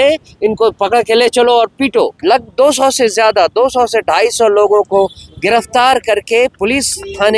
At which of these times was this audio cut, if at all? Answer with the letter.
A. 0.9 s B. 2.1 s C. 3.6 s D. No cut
B